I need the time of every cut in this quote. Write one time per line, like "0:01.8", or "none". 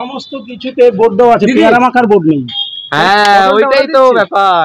none